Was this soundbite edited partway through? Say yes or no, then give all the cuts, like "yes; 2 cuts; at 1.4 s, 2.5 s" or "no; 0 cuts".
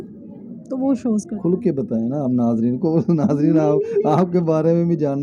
no; 0 cuts